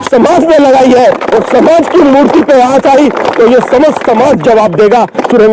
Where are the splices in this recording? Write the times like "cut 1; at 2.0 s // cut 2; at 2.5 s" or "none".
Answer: none